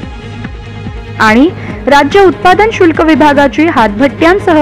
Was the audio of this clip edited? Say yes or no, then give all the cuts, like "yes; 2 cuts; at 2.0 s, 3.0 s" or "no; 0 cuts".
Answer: yes; 1 cut; at 1.2 s